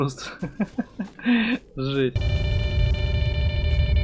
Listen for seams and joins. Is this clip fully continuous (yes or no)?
no